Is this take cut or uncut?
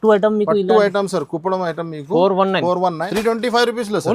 cut